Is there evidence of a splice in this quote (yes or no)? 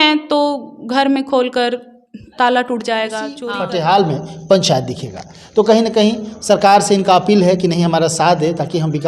yes